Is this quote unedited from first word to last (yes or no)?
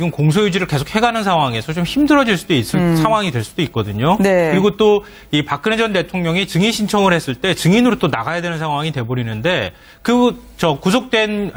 yes